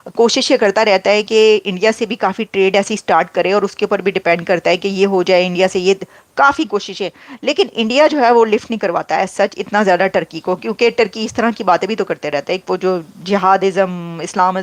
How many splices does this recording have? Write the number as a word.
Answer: zero